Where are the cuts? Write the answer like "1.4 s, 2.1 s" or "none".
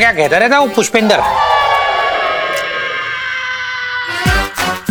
none